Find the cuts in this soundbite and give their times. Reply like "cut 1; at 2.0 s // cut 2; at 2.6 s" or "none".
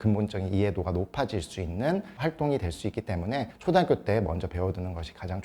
none

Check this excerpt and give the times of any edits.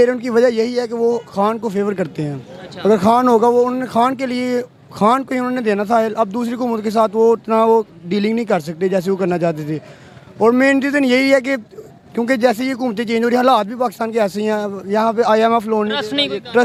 none

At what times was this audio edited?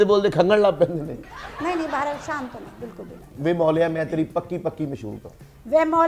cut 1; at 3.3 s

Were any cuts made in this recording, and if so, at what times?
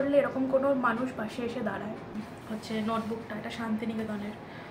cut 1; at 2.2 s

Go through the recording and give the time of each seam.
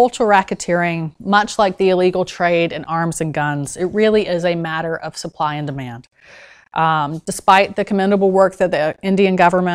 none

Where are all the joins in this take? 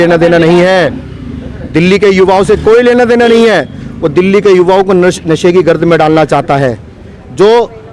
none

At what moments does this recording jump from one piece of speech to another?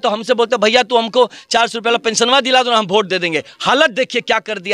none

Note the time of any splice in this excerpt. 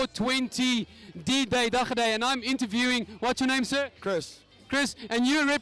cut 1; at 3.6 s

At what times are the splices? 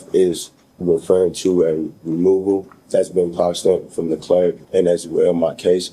cut 1; at 2.8 s // cut 2; at 4.6 s

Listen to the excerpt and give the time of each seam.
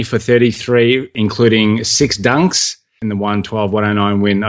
cut 1; at 1.1 s // cut 2; at 3.0 s

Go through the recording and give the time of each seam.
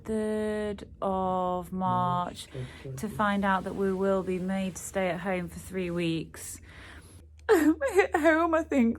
cut 1; at 7.3 s

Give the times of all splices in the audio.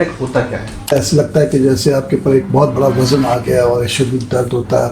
cut 1; at 0.9 s

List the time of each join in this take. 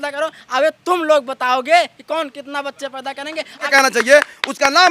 cut 1; at 3.6 s

